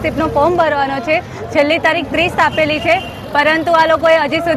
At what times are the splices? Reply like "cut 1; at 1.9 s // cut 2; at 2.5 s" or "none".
none